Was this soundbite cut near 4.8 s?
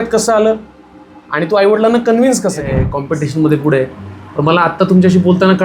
no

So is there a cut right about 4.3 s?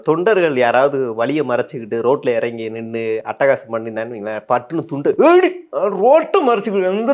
no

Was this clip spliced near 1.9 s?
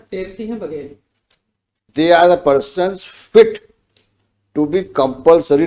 yes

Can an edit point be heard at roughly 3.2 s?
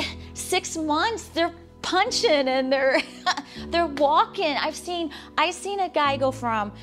no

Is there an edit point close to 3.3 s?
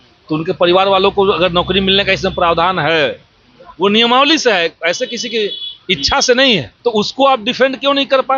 no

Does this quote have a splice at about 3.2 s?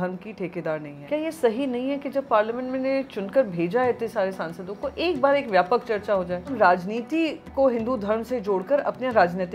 no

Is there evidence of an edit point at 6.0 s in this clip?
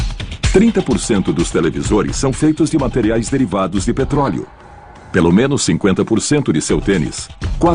no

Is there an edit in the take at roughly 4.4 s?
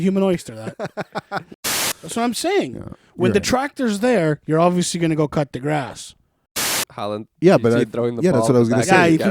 no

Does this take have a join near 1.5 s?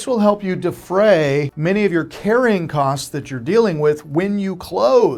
yes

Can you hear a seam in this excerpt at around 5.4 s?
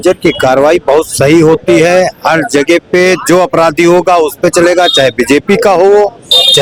no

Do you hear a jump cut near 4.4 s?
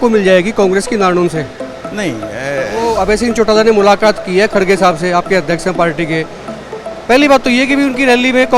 no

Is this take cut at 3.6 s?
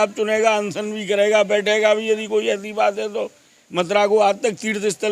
yes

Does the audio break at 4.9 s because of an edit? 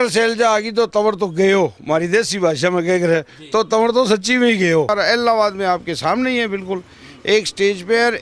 yes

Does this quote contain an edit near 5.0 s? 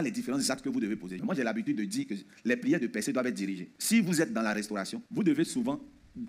yes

